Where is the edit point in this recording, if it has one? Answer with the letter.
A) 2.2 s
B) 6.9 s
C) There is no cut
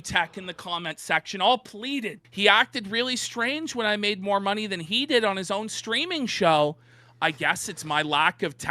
A